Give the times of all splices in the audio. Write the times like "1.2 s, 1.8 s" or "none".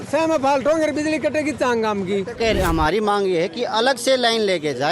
2.3 s